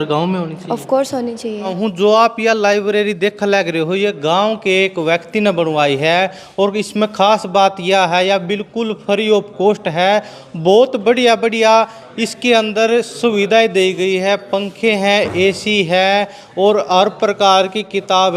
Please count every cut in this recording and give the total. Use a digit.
1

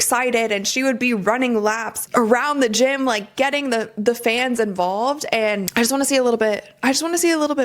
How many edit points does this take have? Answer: 1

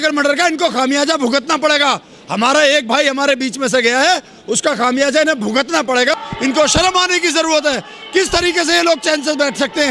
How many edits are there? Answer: 1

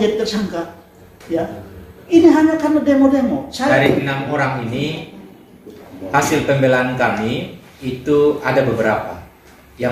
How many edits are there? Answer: 1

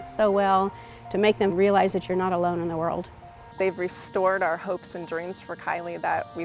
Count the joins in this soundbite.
2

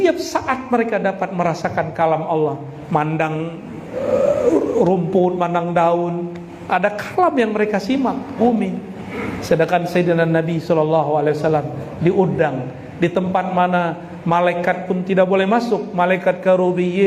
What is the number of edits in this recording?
1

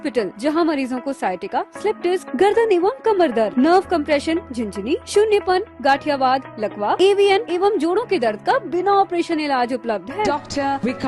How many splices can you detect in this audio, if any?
0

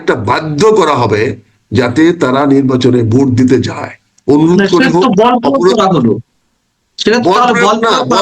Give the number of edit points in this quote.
0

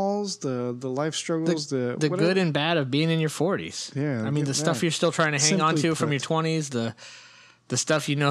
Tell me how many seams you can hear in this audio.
1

